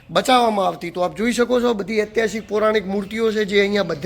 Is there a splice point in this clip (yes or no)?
no